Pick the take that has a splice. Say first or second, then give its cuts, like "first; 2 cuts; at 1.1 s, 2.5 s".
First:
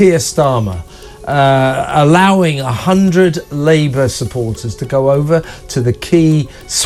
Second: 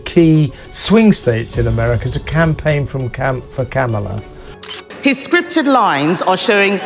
second; 1 cut; at 4.7 s